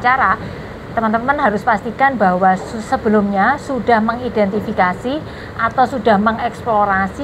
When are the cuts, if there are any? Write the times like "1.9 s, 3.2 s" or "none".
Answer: none